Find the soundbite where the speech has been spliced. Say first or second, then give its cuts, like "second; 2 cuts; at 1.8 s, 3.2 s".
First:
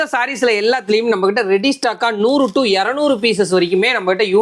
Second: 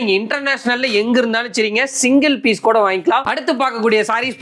second; 1 cut; at 3.2 s